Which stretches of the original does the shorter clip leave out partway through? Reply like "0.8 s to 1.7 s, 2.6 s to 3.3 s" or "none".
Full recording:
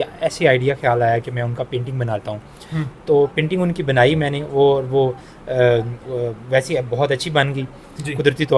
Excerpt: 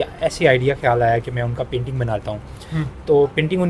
none